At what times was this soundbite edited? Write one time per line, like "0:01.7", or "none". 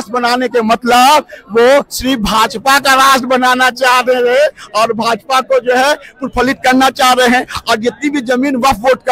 none

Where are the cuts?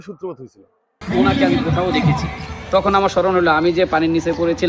0:00.9

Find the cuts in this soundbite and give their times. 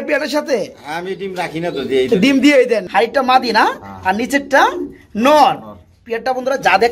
0:02.9

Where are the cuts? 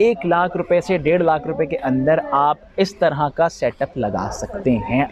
none

